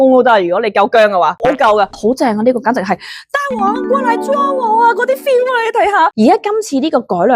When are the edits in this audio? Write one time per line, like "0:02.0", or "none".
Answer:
0:01.9
0:06.1

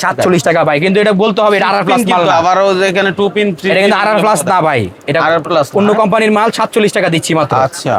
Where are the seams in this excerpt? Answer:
none

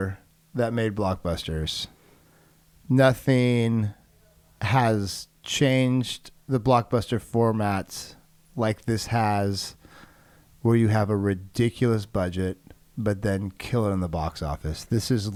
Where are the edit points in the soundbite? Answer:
none

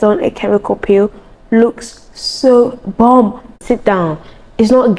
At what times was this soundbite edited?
0:03.6

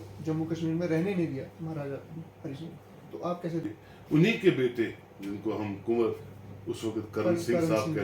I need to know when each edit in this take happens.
0:03.8

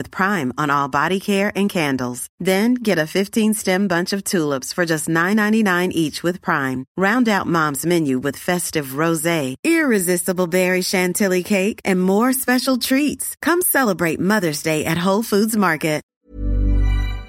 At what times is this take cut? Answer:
0:16.1

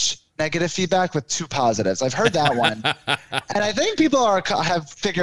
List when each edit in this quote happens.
none

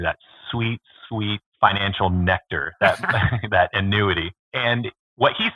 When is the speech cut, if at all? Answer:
0:04.3

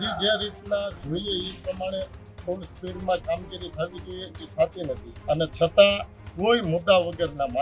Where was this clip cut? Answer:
0:05.1

